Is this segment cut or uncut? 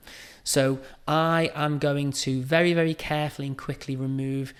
uncut